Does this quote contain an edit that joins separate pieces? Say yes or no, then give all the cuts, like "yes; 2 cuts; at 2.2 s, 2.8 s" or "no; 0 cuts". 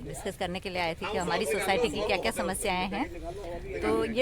no; 0 cuts